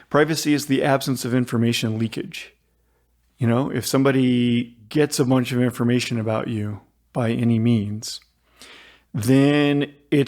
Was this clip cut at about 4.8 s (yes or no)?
yes